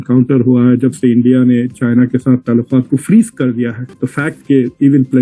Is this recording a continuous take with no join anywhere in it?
no; 1 cut; at 4.1 s

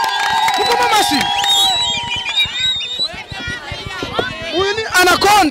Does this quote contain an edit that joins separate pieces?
no; 0 cuts

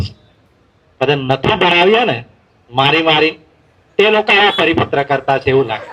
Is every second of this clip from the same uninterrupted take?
yes; 0 cuts

